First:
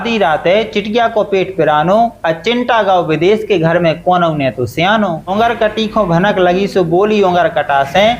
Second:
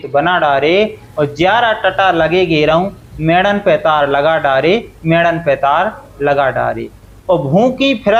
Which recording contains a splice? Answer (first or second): first